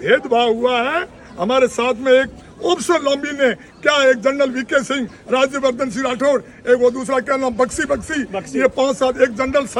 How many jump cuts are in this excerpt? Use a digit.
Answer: 0